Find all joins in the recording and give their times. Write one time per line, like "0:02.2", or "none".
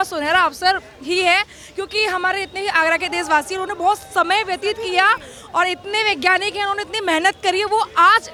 none